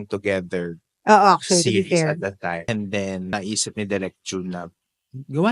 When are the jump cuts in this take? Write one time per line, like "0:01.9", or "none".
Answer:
0:02.6
0:03.3